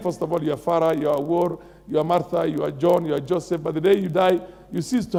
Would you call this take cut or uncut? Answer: uncut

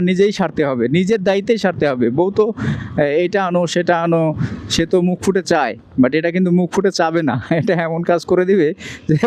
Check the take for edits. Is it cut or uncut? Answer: uncut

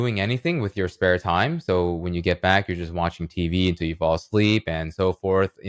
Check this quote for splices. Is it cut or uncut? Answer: uncut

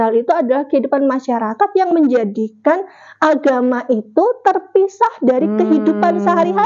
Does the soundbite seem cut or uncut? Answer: uncut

